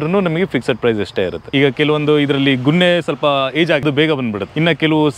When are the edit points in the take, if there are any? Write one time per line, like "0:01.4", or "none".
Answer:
0:01.4
0:04.4